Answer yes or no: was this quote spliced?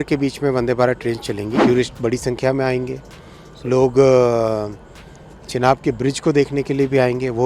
yes